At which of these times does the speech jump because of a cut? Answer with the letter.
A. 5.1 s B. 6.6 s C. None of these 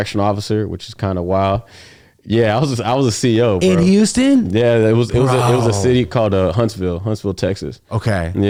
C